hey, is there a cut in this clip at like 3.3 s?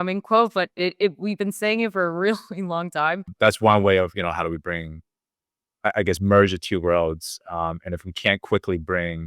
yes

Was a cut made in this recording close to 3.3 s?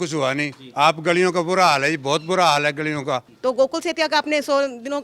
yes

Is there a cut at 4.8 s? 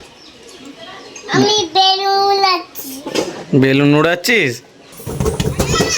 yes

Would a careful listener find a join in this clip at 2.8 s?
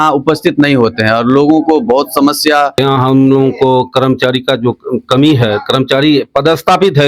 yes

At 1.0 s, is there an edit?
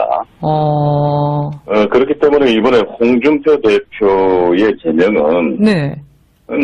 no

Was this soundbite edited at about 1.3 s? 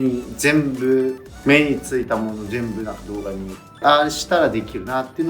yes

